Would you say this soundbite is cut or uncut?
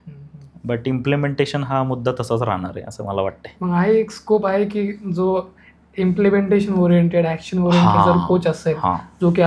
uncut